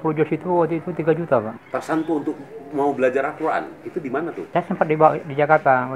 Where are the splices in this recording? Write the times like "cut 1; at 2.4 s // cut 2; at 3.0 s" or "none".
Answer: cut 1; at 1.6 s // cut 2; at 4.4 s

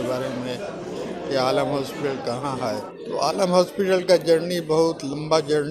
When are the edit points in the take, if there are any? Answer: cut 1; at 2.9 s

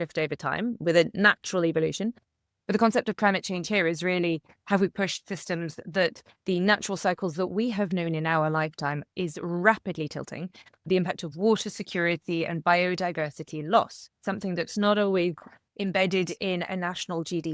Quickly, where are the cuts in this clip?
cut 1; at 14.2 s

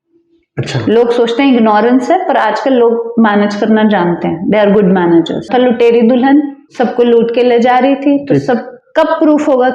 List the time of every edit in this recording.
cut 1; at 5.5 s

